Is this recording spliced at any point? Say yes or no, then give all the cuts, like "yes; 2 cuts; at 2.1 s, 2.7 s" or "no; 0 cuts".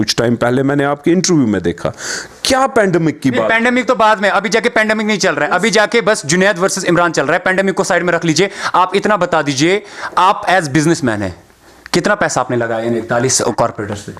no; 0 cuts